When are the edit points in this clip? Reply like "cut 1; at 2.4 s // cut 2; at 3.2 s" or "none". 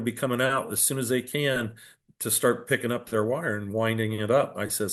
none